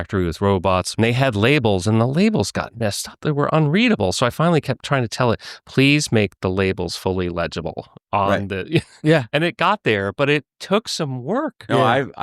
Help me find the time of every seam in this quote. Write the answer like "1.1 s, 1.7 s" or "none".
0.9 s, 3.1 s